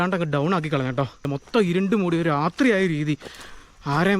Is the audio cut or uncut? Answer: cut